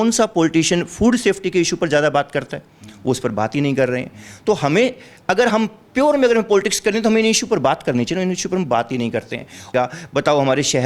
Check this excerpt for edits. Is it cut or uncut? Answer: cut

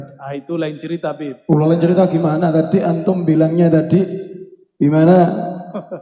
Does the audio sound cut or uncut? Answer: uncut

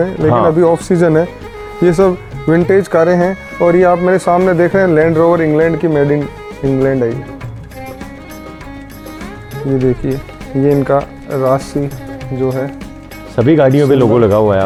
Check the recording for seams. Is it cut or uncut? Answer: uncut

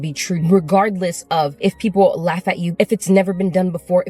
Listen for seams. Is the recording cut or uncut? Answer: cut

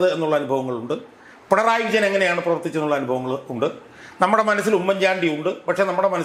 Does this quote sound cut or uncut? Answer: uncut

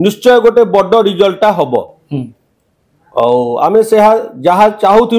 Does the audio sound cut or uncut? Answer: uncut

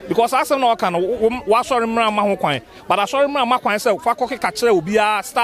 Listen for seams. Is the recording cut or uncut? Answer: uncut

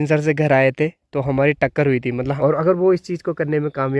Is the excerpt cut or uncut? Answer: cut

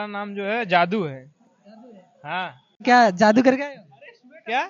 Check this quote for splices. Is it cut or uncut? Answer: cut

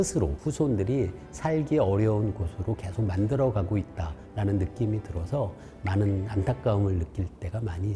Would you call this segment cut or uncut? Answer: uncut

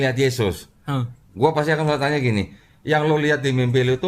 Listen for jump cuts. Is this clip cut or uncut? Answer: uncut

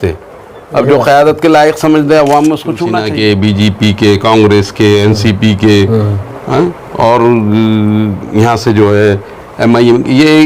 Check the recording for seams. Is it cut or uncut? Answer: cut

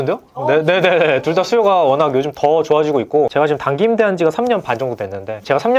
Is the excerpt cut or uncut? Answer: cut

